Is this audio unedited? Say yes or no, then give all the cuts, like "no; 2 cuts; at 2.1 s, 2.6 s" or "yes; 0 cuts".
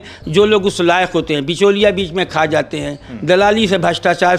yes; 0 cuts